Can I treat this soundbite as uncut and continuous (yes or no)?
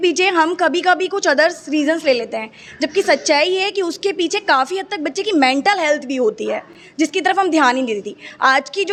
yes